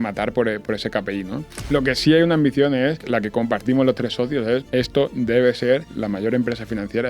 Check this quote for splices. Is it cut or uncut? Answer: cut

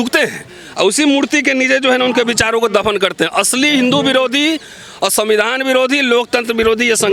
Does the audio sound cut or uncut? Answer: uncut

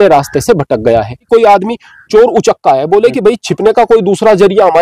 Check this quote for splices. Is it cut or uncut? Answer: cut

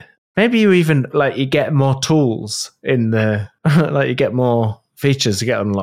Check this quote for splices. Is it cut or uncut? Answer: cut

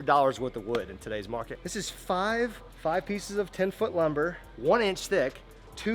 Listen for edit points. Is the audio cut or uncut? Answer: uncut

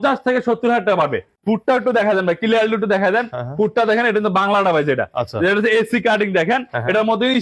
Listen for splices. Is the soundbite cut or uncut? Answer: cut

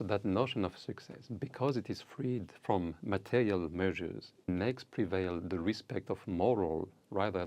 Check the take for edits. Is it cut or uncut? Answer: cut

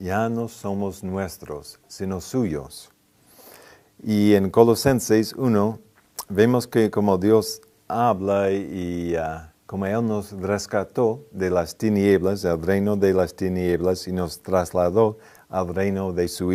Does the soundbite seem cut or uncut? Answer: uncut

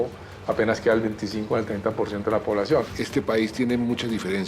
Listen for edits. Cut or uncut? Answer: cut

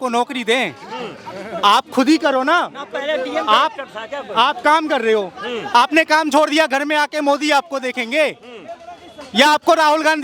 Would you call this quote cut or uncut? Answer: uncut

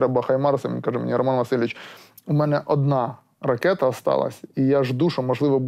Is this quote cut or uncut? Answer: uncut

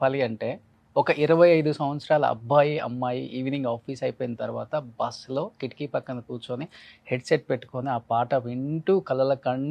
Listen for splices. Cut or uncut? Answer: uncut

